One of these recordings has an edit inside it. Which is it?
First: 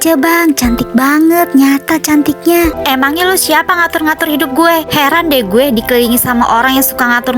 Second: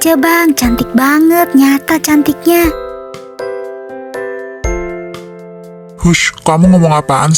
first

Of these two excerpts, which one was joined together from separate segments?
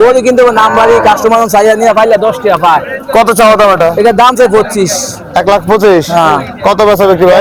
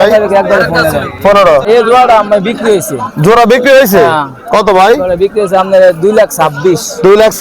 second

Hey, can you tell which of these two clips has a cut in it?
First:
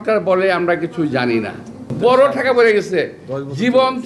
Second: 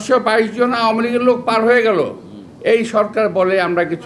first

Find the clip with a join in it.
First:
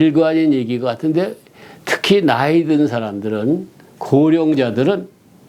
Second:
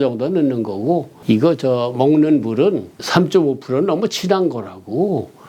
second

